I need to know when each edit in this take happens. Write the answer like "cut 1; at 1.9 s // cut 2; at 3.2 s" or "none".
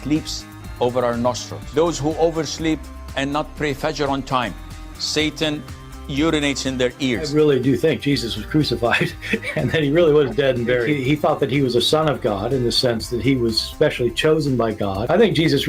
cut 1; at 9.5 s